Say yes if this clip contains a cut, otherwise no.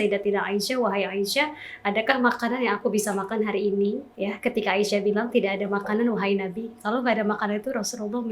yes